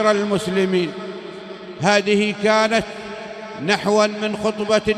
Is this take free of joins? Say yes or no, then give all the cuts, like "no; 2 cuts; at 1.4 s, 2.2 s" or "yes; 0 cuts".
yes; 0 cuts